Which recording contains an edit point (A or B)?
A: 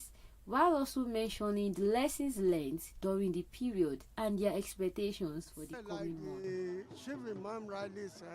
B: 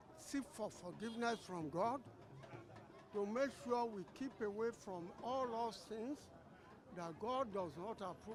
A